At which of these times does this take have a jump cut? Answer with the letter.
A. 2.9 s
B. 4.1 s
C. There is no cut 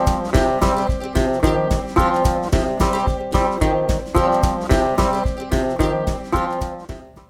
A